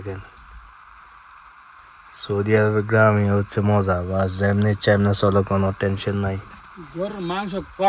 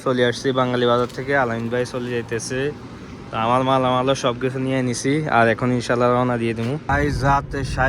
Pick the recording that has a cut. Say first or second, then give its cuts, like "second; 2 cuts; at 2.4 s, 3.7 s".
second; 1 cut; at 6.8 s